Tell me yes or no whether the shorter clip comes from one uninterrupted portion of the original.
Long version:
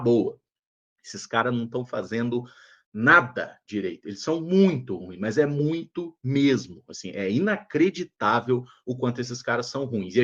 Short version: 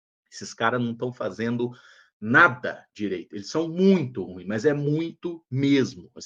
yes